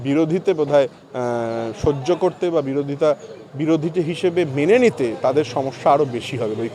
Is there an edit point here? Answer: no; 0 cuts

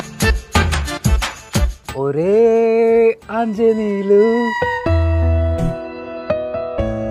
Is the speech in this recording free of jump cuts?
no; 1 cut; at 1.8 s

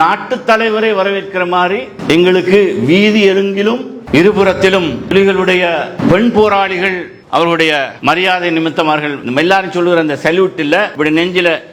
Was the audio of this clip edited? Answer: no; 0 cuts

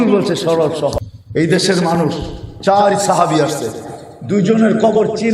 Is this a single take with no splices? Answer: no; 1 cut; at 1.1 s

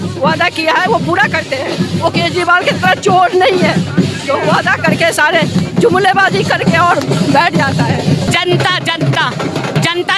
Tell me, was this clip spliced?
no; 0 cuts

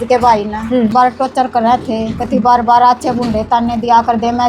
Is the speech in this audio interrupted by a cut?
yes; 1 cut; at 0.9 s

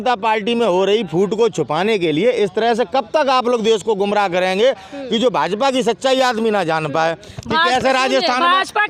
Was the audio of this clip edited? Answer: no; 0 cuts

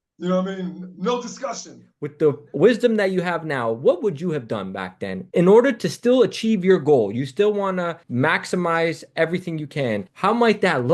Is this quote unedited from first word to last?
no; 2 cuts; at 2.0 s, 10.1 s

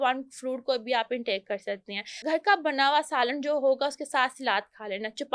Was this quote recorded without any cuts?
no; 1 cut; at 2.1 s

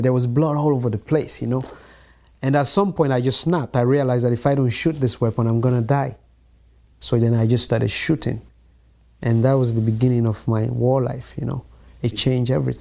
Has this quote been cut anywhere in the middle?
no; 0 cuts

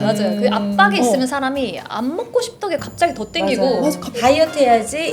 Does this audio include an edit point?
yes; 1 cut; at 4.1 s

